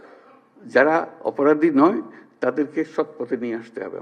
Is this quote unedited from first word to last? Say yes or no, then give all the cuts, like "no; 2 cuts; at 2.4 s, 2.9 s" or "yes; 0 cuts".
yes; 0 cuts